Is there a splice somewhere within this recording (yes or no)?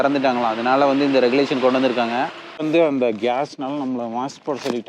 yes